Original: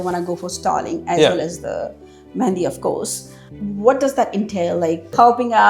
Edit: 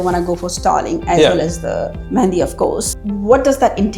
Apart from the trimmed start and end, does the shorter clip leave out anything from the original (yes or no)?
yes